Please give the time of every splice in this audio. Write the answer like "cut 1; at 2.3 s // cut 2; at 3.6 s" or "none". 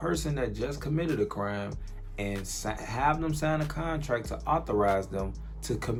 none